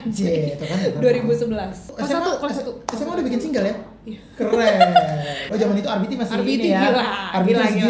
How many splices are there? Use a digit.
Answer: 2